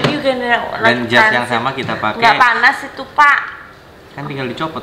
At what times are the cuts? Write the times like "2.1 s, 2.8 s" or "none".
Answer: none